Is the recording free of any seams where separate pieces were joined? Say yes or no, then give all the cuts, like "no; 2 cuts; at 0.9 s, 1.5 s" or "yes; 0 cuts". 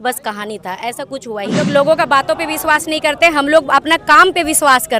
no; 1 cut; at 1.7 s